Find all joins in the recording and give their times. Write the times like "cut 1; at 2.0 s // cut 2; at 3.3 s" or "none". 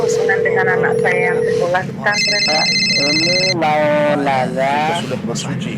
none